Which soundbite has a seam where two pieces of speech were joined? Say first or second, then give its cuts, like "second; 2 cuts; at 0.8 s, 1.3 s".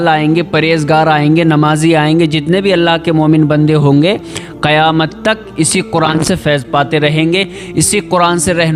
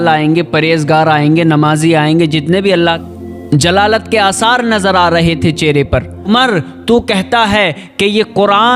second; 2 cuts; at 3.0 s, 6.3 s